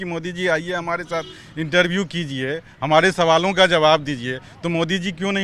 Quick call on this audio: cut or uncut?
uncut